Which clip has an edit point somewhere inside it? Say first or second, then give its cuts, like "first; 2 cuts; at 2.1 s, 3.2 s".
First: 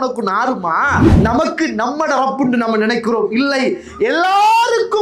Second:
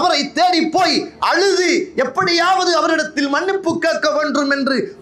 first; 1 cut; at 1.1 s